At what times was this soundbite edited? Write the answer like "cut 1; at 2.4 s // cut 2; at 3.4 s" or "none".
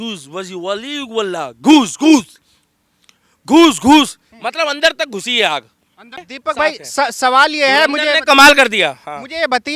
cut 1; at 6.3 s